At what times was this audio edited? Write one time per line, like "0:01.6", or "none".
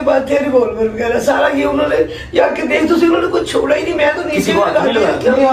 none